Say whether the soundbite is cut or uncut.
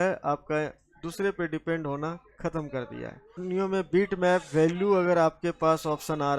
cut